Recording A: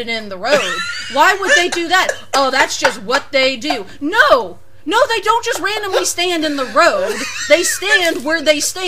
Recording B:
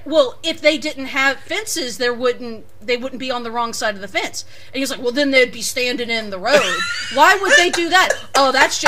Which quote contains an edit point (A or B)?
B